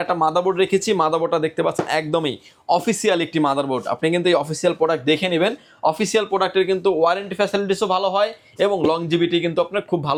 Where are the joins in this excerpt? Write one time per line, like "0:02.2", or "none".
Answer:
none